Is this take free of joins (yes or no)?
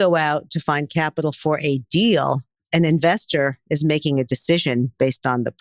no